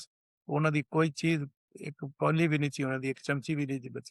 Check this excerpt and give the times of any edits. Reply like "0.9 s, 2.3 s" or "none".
none